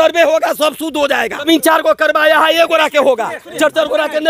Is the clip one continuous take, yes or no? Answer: no